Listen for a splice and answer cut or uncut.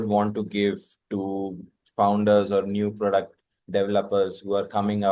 uncut